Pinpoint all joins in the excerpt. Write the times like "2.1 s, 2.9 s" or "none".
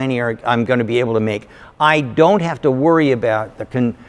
none